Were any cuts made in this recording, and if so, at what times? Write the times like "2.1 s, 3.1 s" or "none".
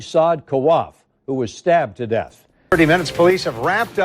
2.7 s